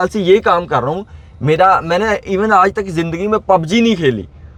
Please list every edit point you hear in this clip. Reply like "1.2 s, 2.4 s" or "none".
none